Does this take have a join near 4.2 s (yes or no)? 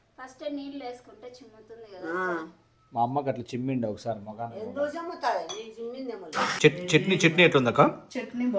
no